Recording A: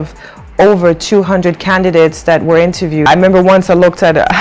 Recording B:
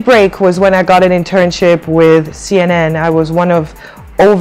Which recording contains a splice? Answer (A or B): A